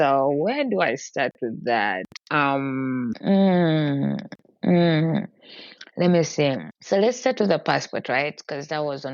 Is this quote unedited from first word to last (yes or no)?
no